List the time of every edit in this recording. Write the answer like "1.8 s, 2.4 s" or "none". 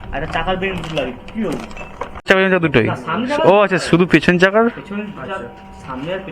2.3 s